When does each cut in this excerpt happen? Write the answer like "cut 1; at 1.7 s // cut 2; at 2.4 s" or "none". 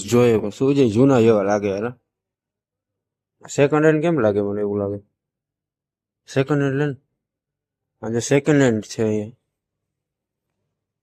none